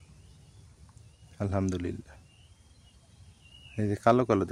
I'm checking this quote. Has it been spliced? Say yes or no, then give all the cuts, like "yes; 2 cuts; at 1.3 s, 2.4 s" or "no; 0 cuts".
no; 0 cuts